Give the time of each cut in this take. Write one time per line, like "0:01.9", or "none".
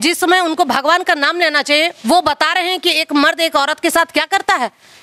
none